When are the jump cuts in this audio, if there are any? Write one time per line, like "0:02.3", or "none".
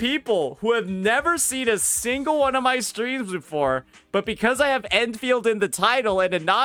none